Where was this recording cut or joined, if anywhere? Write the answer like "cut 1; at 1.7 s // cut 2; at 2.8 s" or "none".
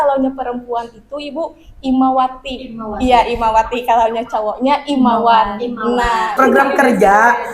cut 1; at 6.4 s